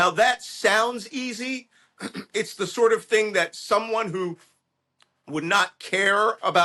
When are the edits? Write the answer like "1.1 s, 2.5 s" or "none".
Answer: none